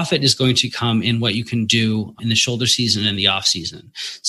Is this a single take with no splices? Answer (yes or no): no